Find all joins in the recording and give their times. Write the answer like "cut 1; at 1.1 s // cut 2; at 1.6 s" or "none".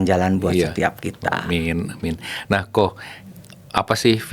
none